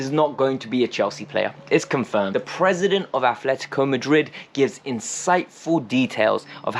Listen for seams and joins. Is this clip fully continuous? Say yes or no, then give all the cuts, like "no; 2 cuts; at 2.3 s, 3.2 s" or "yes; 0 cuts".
no; 1 cut; at 2.3 s